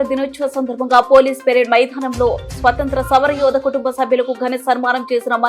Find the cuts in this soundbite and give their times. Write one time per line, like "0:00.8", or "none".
none